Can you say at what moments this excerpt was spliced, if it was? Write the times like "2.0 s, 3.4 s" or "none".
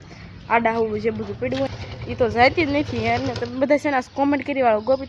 1.8 s

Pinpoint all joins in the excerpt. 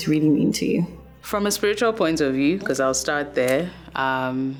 none

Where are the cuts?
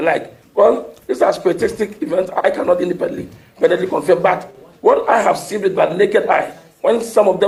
none

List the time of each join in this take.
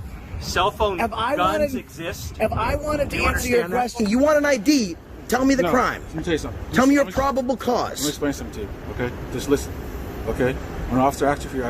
4.0 s

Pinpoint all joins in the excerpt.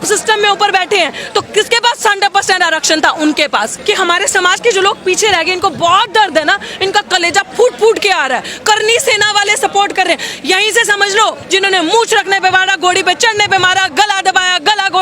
3.7 s, 11.4 s

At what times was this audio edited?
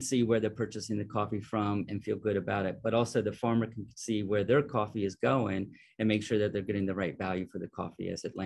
none

